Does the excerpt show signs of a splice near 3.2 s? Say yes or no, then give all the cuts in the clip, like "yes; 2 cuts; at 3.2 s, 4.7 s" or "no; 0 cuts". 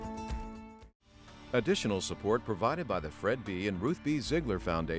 no; 1 cut; at 1.3 s